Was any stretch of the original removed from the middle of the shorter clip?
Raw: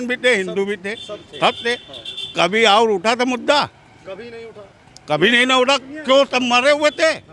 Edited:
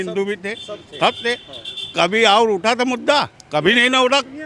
yes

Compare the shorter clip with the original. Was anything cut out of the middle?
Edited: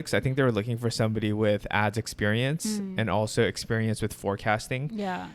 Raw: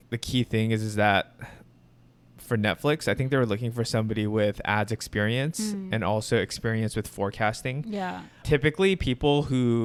no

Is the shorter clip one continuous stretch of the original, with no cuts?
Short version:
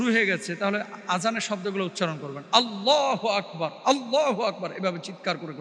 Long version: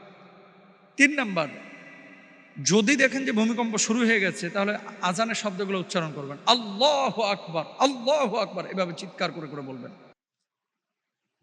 yes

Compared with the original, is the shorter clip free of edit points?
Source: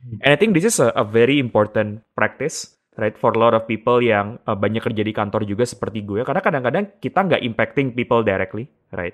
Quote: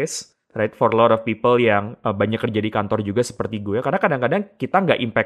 yes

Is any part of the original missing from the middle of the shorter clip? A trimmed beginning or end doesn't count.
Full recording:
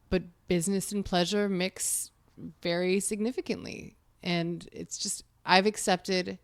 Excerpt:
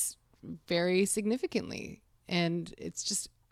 no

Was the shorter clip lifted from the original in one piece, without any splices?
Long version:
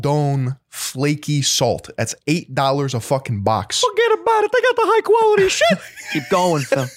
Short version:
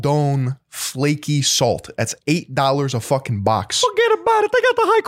yes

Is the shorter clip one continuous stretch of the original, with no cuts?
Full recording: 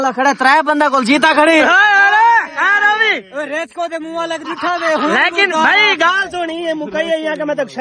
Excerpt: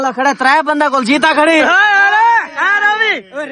yes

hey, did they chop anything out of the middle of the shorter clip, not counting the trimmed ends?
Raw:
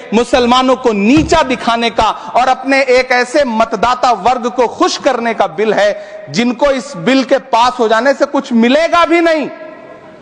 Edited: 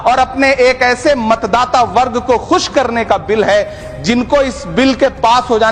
no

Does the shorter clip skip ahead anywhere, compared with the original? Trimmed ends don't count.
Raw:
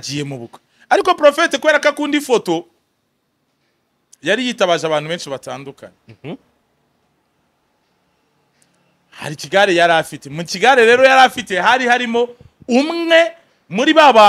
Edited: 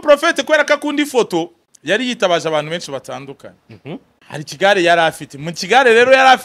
yes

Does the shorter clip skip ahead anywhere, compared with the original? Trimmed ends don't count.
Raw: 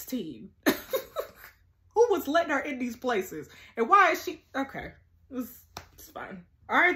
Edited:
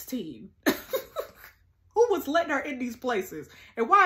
no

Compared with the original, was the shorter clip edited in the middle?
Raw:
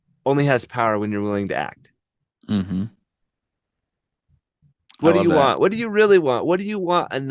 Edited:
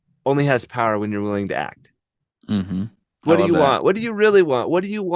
yes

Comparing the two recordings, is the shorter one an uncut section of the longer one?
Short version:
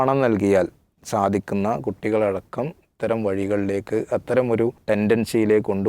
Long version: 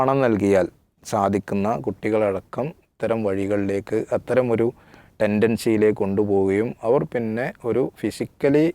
no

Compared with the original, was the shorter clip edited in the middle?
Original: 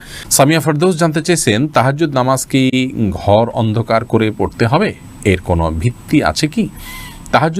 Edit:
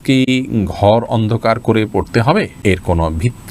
yes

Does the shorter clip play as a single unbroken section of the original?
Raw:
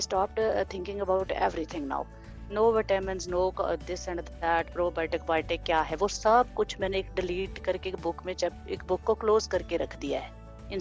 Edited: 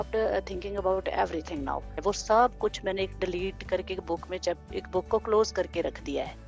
no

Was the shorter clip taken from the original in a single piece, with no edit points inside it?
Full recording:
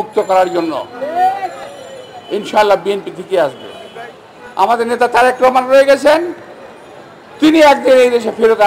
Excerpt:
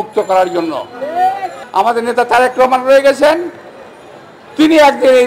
no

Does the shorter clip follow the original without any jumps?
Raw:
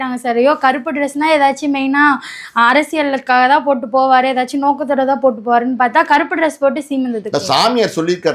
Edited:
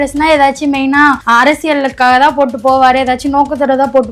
no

